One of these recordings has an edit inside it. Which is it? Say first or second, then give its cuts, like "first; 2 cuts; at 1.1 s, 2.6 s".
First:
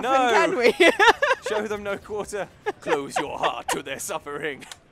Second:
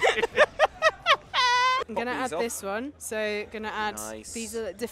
second; 1 cut; at 1.9 s